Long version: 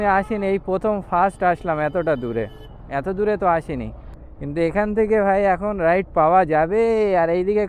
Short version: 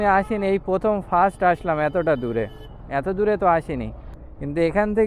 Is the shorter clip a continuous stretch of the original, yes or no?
yes